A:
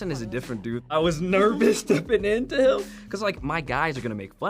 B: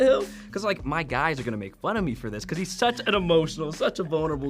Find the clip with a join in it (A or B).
A